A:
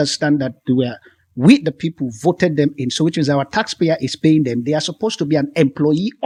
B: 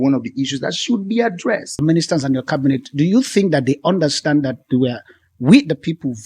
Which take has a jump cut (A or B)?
B